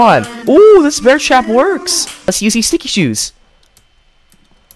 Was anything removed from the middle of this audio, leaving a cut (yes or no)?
yes